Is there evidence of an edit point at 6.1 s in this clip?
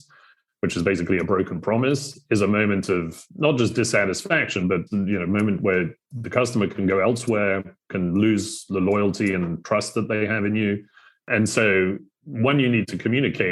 no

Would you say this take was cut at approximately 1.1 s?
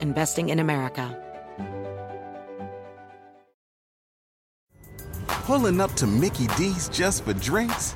yes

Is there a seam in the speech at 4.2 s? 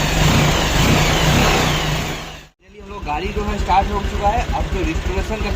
no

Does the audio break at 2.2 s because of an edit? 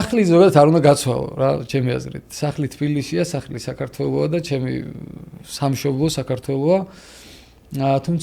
no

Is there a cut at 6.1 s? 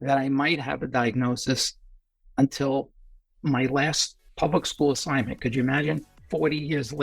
yes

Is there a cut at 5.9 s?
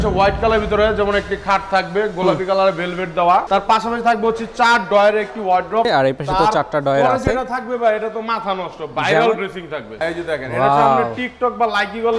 yes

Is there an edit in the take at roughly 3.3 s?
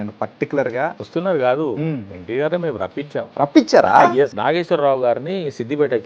yes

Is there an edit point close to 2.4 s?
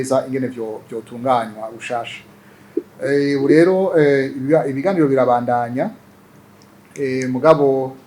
no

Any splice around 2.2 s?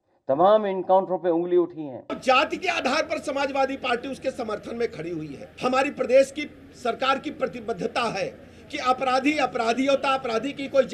yes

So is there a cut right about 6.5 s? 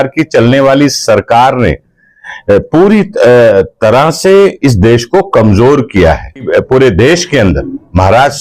yes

